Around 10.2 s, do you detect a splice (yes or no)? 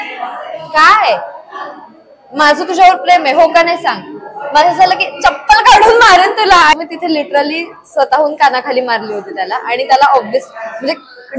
no